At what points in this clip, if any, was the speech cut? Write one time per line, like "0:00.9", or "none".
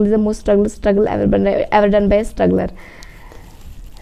none